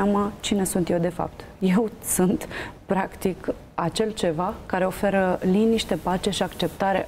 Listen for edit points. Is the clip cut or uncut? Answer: uncut